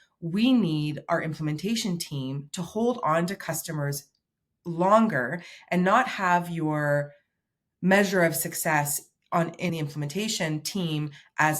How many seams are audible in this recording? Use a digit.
1